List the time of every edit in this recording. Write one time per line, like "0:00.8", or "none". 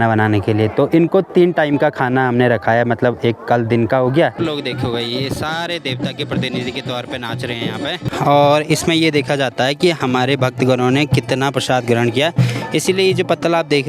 0:04.4
0:08.1